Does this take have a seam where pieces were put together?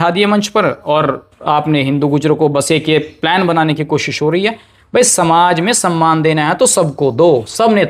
no; 0 cuts

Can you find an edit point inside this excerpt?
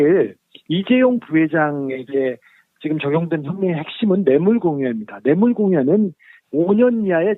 no; 0 cuts

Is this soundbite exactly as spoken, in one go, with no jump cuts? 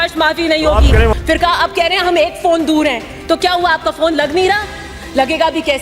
no; 1 cut; at 1.2 s

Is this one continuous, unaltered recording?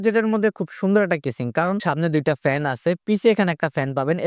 no; 1 cut; at 1.8 s

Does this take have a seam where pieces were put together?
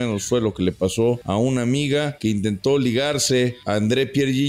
yes; 3 cuts; at 1.2 s, 2.1 s, 3.6 s

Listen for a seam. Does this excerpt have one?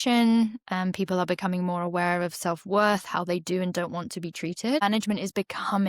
yes; 1 cut; at 4.8 s

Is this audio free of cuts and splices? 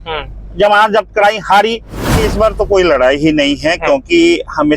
no; 1 cut; at 2.2 s

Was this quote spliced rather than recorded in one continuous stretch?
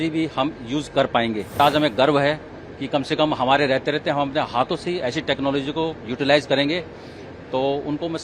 yes; 1 cut; at 1.6 s

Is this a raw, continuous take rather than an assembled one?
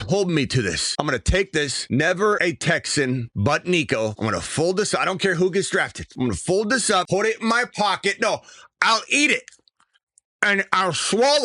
no; 7 cuts; at 0.8 s, 1.8 s, 2.4 s, 3.3 s, 4.2 s, 6.0 s, 7.1 s

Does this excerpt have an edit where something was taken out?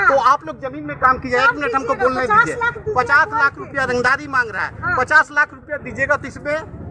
no; 0 cuts

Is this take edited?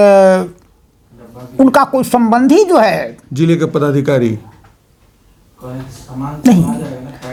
no; 0 cuts

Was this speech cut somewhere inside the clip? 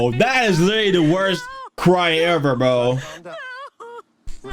no; 0 cuts

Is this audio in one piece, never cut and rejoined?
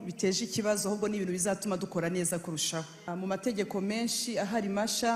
no; 1 cut; at 3.1 s

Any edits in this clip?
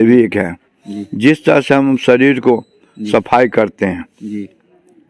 no; 0 cuts

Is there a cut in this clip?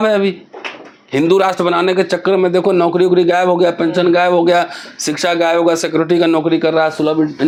no; 0 cuts

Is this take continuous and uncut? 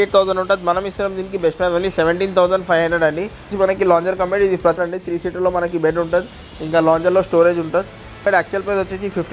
no; 3 cuts; at 3.5 s, 4.8 s, 8.2 s

